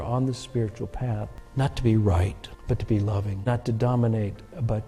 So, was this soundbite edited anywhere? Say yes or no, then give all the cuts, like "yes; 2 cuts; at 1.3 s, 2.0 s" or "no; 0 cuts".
yes; 3 cuts; at 1.4 s, 2.5 s, 3.4 s